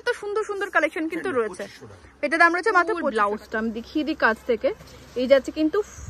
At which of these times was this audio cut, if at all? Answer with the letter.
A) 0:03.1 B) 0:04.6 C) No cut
A